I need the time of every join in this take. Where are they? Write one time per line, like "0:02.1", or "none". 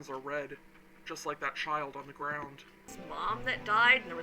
0:02.9